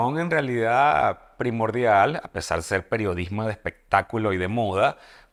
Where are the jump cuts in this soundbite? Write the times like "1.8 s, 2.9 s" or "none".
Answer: none